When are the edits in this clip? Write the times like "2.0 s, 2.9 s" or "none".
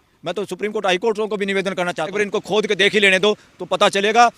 2.0 s